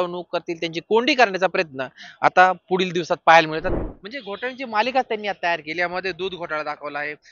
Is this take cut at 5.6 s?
no; 1 cut; at 3.7 s

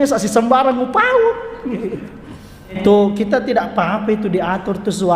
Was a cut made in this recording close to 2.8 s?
yes; 1 cut; at 2.8 s

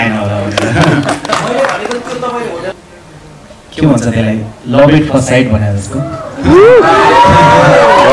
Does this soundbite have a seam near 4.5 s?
no; 1 cut; at 2.7 s

